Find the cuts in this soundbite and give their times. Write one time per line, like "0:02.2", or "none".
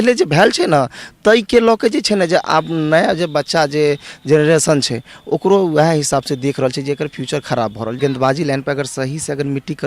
0:08.0